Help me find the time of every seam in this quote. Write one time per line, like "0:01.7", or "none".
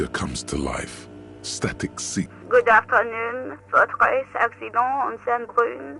0:02.4